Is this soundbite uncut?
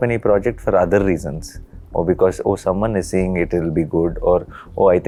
yes; 0 cuts

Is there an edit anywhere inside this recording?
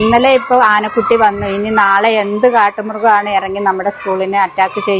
no; 0 cuts

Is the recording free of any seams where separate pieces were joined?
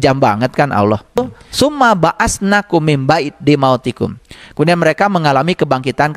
no; 1 cut; at 1.2 s

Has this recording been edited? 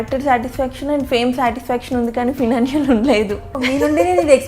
yes; 1 cut; at 3.6 s

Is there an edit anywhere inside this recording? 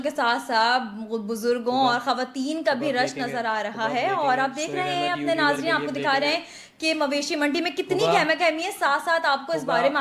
no; 0 cuts

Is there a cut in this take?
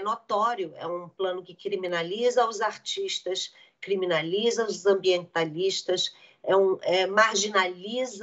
no; 0 cuts

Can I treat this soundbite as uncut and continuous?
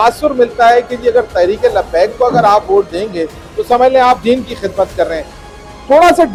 yes; 0 cuts

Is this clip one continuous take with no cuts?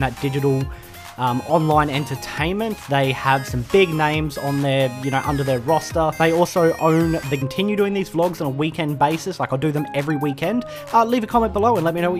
yes; 0 cuts

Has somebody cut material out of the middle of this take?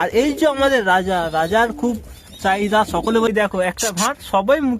yes; 1 cut; at 3.3 s

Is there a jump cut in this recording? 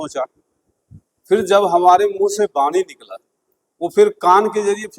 no; 0 cuts

